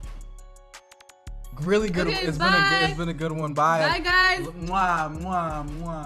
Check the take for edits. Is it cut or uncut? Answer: cut